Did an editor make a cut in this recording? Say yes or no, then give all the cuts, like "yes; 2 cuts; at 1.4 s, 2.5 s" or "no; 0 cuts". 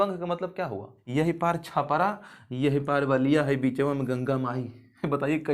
yes; 1 cut; at 1.0 s